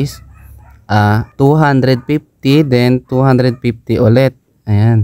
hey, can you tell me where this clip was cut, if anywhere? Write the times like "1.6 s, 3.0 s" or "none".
1.3 s